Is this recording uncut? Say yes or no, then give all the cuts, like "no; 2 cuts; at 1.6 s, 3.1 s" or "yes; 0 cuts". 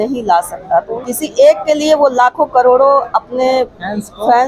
no; 1 cut; at 0.9 s